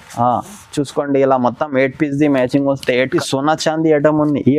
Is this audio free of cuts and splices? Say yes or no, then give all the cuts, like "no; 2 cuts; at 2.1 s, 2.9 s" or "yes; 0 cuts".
no; 1 cut; at 3.1 s